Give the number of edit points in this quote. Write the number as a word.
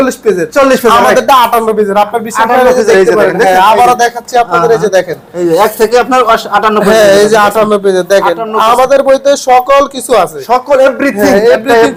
zero